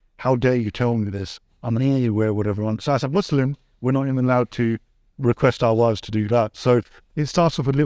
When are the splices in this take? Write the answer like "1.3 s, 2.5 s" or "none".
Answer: none

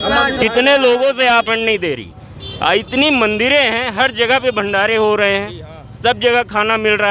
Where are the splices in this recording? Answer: 1.5 s

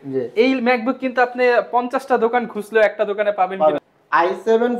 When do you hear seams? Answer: 3.9 s

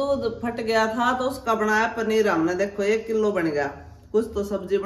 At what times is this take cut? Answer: none

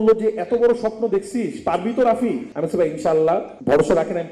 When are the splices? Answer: none

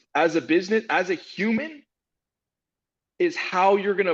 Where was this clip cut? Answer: none

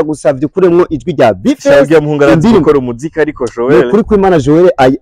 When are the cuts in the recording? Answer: none

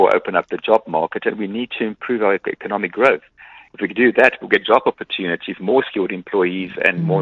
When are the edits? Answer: none

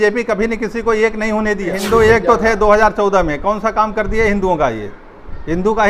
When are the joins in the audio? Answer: 1.7 s

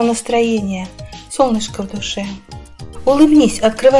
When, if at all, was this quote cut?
2.4 s

